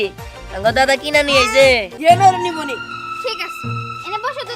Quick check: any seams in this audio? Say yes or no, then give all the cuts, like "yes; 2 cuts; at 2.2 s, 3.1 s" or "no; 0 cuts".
yes; 1 cut; at 1.9 s